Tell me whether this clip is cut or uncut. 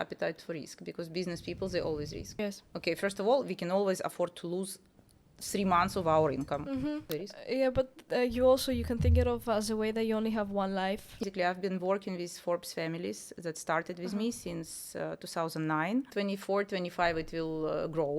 cut